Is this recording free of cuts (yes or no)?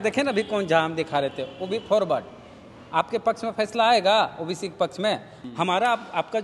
no